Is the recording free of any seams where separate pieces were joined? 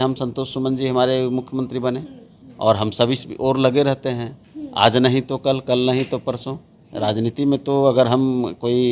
yes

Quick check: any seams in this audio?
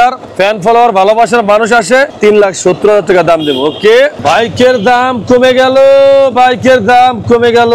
yes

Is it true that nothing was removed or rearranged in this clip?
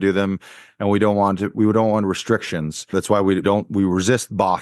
no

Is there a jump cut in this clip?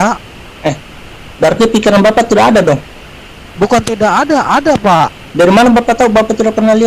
no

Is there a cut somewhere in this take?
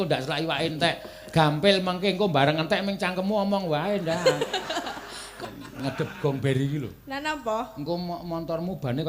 yes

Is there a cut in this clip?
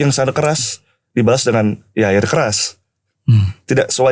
no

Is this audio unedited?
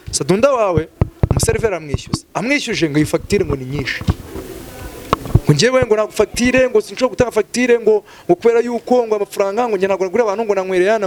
yes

